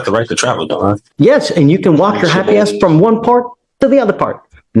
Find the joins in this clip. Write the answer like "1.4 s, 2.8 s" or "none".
1.0 s